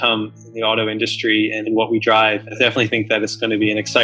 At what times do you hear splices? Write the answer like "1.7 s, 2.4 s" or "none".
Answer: 2.6 s